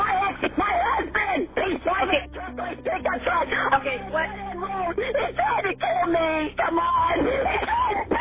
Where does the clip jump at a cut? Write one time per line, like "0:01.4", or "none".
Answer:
none